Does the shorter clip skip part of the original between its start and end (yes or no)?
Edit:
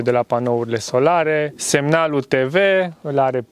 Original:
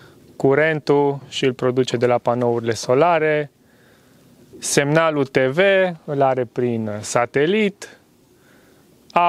yes